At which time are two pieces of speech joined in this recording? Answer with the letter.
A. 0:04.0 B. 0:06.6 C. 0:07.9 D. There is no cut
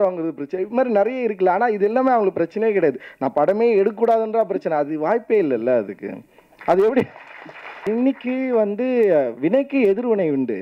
C